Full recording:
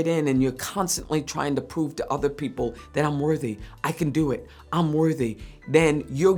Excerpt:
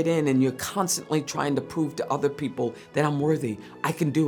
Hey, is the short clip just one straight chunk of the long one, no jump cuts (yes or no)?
yes